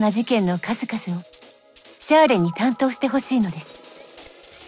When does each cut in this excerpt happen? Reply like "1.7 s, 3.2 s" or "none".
3.6 s